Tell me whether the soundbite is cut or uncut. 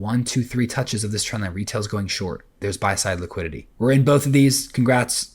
cut